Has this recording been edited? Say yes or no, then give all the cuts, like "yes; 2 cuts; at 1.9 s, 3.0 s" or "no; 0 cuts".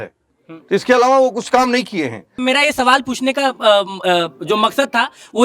yes; 1 cut; at 2.4 s